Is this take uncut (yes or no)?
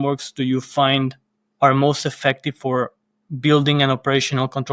yes